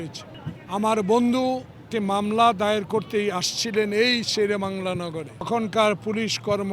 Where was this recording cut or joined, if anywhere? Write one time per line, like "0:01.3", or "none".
0:01.9
0:05.5